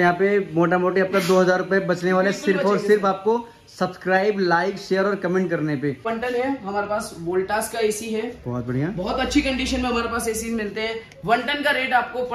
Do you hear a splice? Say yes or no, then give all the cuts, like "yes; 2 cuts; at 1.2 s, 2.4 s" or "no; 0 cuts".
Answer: yes; 1 cut; at 6.1 s